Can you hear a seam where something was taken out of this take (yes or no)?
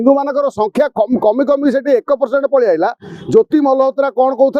no